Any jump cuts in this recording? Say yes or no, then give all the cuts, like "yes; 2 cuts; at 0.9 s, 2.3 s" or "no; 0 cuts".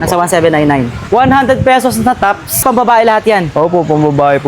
yes; 2 cuts; at 1.0 s, 2.6 s